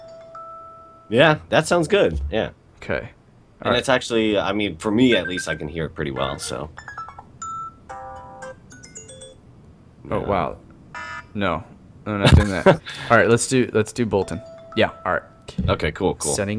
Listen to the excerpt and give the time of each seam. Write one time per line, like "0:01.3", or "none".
none